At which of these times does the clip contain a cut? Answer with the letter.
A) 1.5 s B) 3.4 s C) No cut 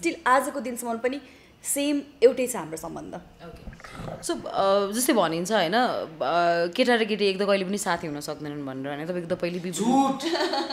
C